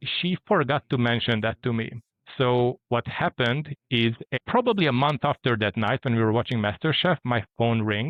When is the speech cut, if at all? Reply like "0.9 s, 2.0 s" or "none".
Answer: none